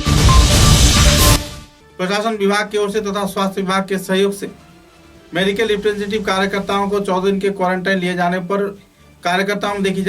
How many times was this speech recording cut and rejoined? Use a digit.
1